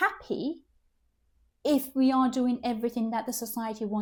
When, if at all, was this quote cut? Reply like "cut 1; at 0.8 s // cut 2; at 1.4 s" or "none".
none